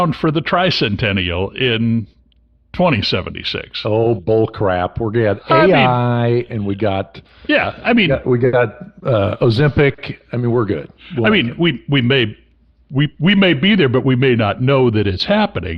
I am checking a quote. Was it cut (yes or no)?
no